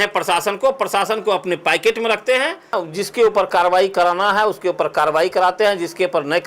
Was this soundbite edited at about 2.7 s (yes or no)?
yes